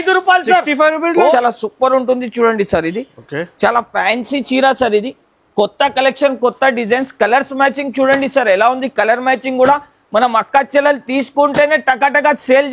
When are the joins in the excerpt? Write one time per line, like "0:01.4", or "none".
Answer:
0:01.3

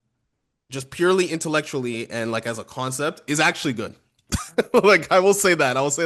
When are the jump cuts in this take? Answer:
none

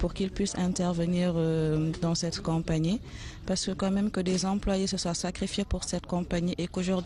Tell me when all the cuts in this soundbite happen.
0:02.7

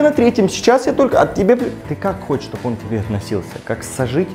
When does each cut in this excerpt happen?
0:01.8

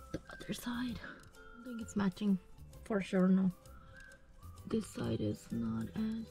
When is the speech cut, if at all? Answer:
0:01.8

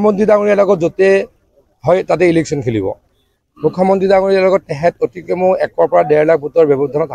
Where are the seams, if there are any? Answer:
0:04.7

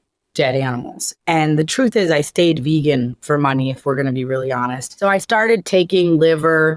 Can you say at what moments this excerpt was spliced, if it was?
0:01.0
0:04.8

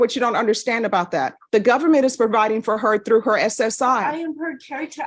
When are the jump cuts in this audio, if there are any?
0:01.4

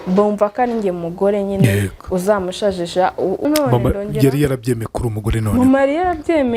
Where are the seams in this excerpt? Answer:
0:03.4

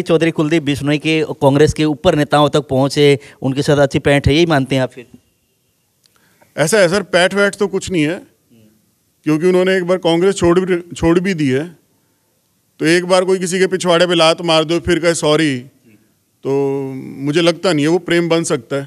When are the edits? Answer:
none

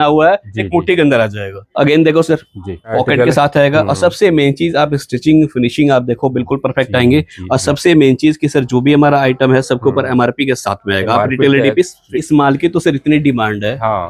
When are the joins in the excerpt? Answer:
0:01.6
0:02.9
0:12.1

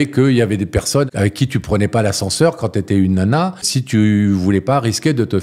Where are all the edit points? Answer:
0:01.1
0:03.7

